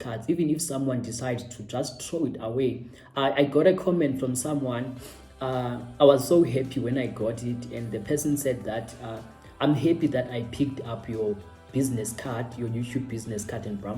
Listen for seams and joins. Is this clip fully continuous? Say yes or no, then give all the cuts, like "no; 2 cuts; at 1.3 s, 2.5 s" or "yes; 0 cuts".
yes; 0 cuts